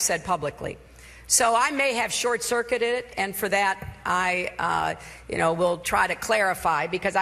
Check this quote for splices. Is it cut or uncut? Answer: cut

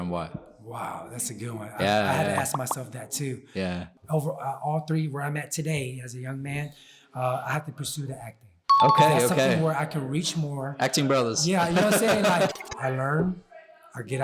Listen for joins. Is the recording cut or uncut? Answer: cut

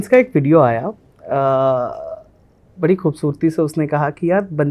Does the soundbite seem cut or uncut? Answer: uncut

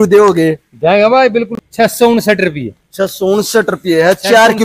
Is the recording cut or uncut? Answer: cut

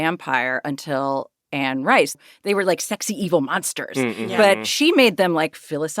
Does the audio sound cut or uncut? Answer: cut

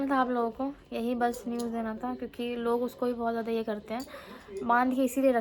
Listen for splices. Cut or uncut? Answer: uncut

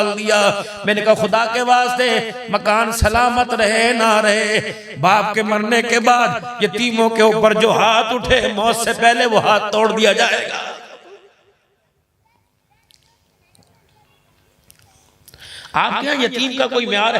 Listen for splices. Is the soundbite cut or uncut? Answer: uncut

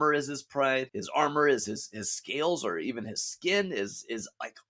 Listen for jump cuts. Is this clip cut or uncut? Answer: cut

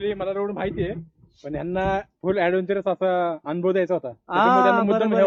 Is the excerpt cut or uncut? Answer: uncut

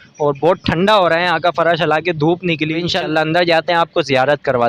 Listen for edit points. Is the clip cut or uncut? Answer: cut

